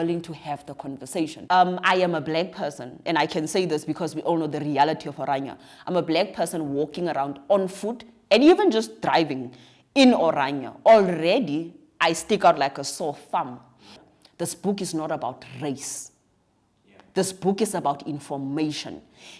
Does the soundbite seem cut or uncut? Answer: cut